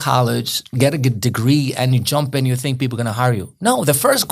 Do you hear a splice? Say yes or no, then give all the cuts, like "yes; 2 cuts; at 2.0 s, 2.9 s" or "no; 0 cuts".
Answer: no; 0 cuts